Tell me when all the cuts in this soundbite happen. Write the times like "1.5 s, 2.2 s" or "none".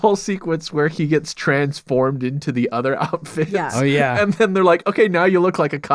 0.9 s

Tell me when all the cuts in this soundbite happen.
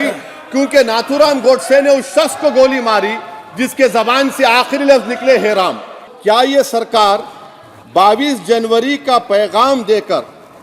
6.1 s

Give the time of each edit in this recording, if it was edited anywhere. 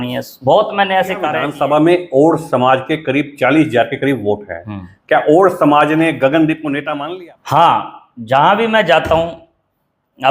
1.4 s, 6.9 s

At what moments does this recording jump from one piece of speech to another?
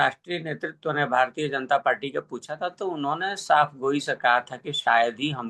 none

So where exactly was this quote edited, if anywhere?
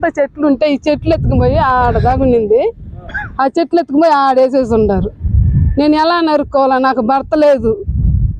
6.4 s

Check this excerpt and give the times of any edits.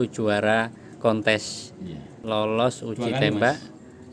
2.1 s

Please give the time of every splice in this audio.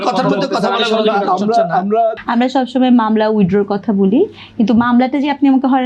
2.2 s

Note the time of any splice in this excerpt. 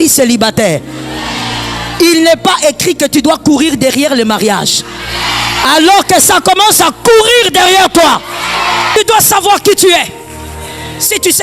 8.9 s

